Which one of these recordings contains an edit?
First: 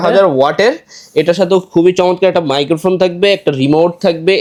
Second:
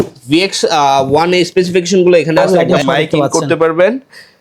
second; 1 cut; at 2.4 s

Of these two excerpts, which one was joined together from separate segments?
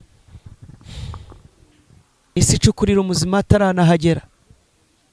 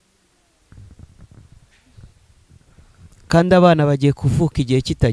first; 1 cut; at 2.4 s

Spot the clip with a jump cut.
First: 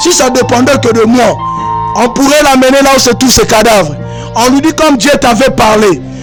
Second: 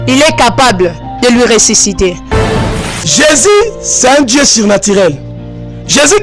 second; 1 cut; at 2.6 s

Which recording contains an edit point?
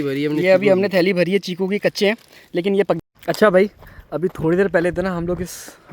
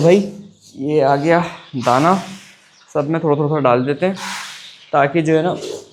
first; 1 cut; at 3.0 s

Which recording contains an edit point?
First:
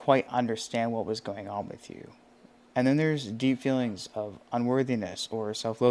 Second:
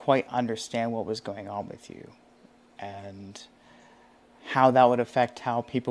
first; 1 cut; at 2.5 s

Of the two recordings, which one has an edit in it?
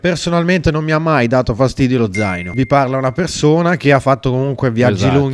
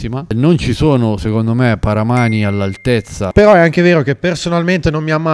second; 1 cut; at 3.3 s

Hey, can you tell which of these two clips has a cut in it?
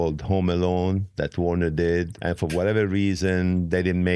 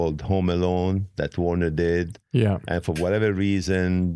first; 1 cut; at 2.2 s

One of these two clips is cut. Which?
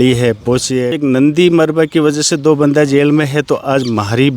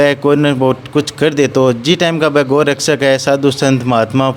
first; 1 cut; at 1.0 s

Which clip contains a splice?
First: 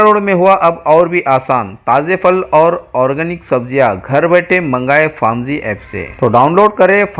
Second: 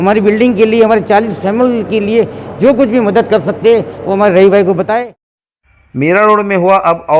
second; 1 cut; at 5.0 s

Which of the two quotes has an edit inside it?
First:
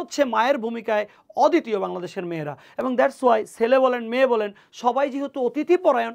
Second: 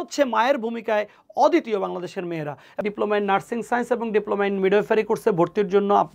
second; 1 cut; at 2.8 s

